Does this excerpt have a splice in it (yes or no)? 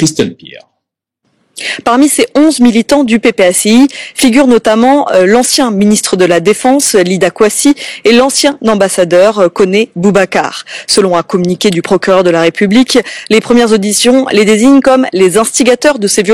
yes